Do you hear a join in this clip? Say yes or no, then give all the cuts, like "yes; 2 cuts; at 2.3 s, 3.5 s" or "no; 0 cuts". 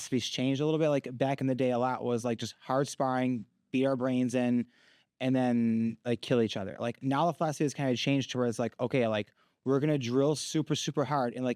no; 0 cuts